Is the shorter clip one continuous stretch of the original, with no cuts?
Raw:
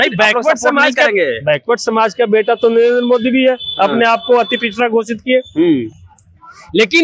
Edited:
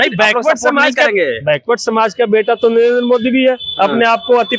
yes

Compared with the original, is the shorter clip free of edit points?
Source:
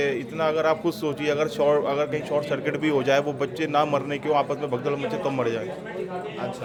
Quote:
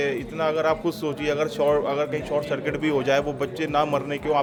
yes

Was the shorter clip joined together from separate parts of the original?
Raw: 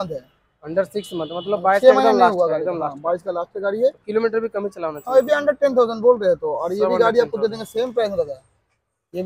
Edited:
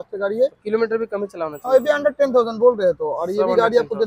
no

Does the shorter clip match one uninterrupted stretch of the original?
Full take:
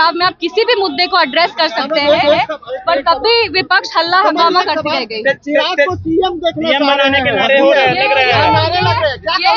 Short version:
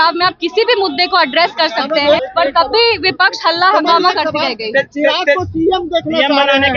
no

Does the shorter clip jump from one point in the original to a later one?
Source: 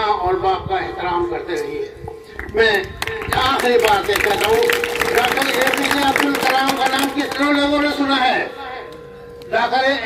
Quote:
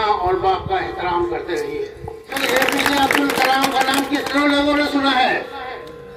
yes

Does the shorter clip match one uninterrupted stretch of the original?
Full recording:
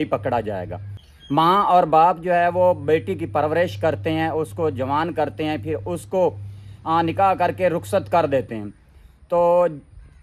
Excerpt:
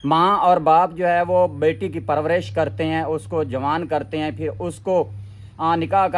yes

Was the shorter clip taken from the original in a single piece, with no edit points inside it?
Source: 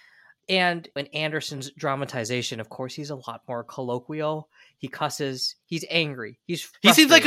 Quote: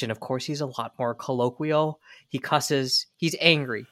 yes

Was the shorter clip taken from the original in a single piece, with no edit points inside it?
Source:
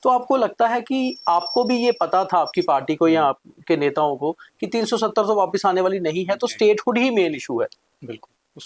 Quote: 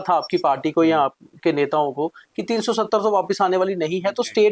yes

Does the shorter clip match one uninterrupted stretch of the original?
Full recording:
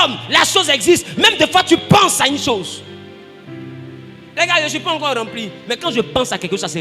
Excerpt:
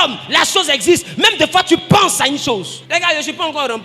no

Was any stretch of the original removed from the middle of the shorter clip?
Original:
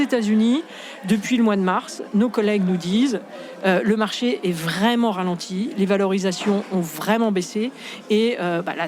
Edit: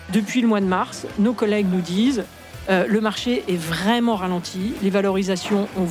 no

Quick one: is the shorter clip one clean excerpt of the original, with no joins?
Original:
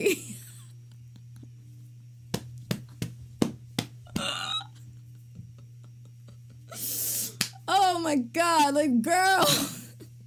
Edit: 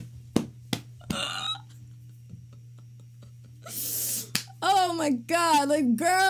yes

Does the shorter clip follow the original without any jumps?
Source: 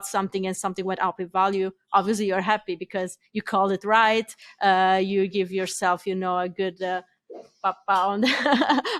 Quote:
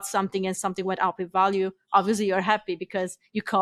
yes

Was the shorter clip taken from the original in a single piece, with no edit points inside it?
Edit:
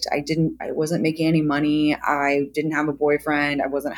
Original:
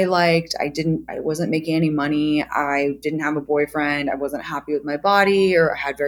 yes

